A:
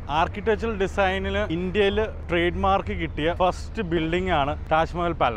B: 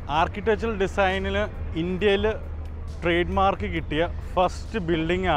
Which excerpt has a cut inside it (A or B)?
A